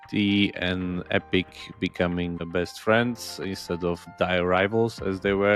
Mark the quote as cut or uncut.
cut